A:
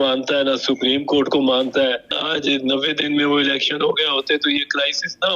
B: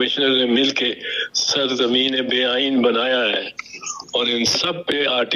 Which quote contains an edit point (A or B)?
A